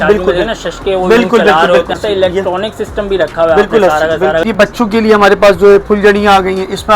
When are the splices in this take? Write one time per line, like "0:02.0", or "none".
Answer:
0:02.0
0:04.4